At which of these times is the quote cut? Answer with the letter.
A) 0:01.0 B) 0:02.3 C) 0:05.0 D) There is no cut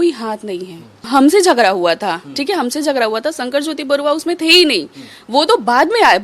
A